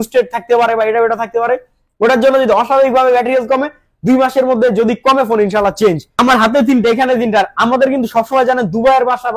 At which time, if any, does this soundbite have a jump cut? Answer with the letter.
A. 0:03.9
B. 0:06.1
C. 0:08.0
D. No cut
B